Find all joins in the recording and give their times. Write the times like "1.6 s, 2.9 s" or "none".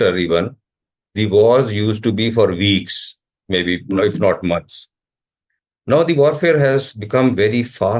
none

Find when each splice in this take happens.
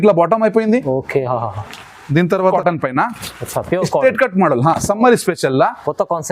2.5 s

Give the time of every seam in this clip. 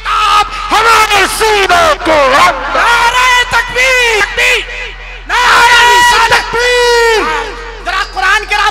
4.2 s

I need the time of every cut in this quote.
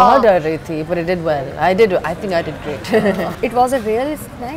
3.3 s

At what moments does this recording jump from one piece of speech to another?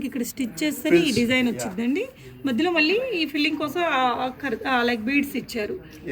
none

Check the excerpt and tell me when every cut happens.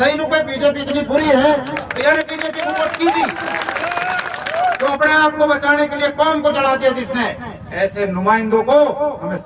4.8 s

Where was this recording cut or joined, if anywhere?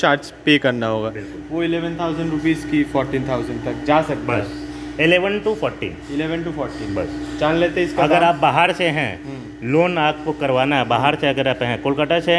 none

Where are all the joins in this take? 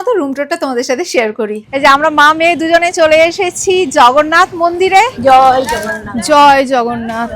1.6 s, 5.1 s

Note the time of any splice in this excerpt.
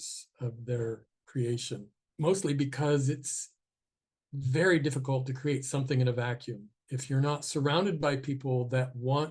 1.1 s, 2.0 s

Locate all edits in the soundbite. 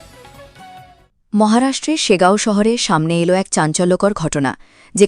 1.1 s

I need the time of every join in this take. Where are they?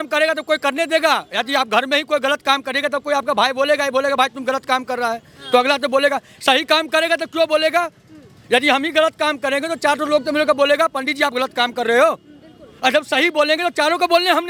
none

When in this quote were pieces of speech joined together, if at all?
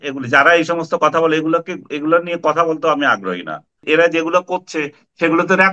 3.8 s

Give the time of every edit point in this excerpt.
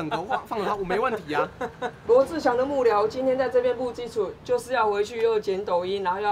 1.9 s

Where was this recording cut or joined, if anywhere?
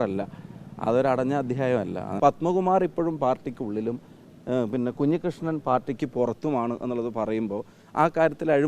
2.1 s

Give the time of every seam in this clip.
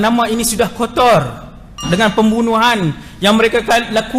1.8 s

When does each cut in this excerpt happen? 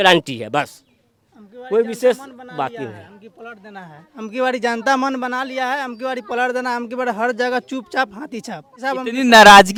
none

